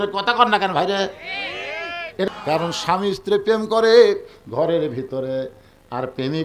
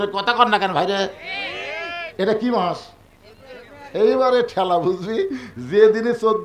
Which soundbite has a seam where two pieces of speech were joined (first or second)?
first